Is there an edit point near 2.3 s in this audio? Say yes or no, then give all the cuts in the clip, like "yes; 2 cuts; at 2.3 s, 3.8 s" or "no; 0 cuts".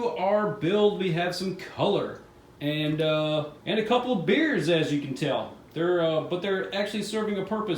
no; 1 cut; at 3.5 s